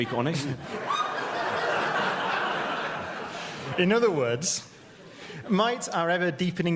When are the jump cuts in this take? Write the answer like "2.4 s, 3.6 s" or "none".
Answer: 1.6 s